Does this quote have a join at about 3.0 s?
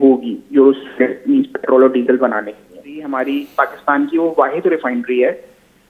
yes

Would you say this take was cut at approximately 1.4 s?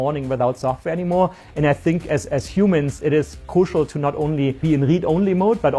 no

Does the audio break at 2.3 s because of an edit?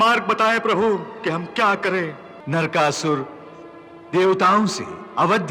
yes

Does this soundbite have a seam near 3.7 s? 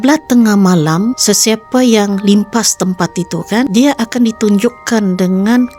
yes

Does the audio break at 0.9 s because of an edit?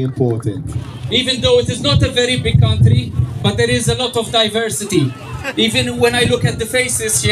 yes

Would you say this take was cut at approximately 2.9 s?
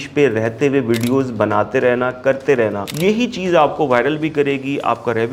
yes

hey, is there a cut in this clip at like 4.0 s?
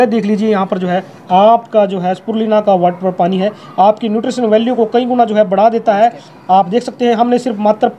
no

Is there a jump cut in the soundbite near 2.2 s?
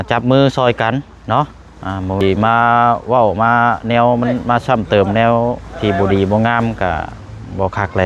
yes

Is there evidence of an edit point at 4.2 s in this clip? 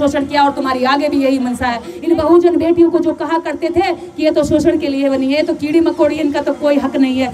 no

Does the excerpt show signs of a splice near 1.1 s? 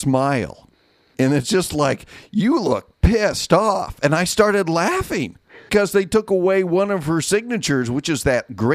yes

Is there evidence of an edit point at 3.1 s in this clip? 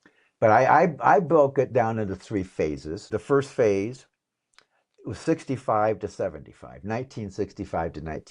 yes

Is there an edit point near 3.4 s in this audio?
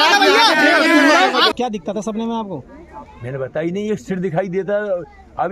no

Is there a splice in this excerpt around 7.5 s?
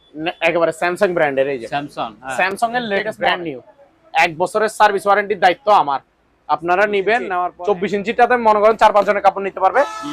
yes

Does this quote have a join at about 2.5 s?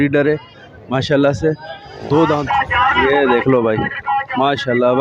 yes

